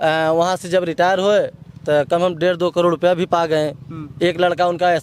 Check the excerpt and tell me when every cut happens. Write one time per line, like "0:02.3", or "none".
none